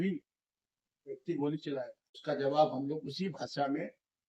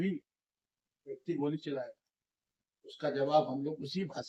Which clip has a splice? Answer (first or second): first